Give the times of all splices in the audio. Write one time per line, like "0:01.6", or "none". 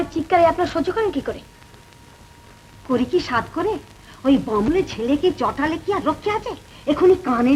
none